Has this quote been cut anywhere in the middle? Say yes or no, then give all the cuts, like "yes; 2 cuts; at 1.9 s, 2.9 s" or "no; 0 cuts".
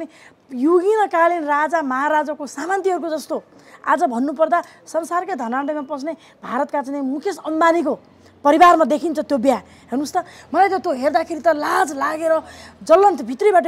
no; 0 cuts